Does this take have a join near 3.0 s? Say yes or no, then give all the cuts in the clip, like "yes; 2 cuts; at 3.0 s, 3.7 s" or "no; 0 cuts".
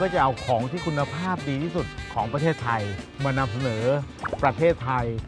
yes; 2 cuts; at 3.0 s, 4.2 s